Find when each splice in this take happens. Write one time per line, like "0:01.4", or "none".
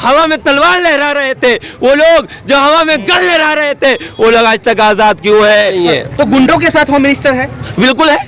0:05.8